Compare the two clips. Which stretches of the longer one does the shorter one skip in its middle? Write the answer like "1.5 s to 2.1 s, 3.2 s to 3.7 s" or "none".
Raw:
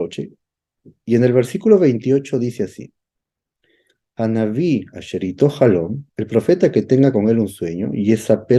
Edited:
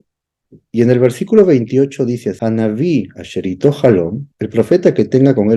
2.7 s to 4.1 s